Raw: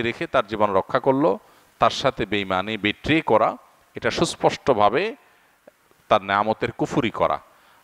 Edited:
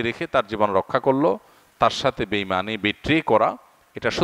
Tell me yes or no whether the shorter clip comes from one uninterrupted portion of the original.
yes